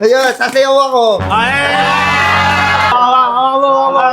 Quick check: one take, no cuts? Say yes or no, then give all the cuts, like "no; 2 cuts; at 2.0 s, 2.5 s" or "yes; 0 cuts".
no; 1 cut; at 2.9 s